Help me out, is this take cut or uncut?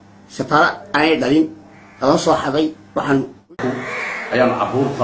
cut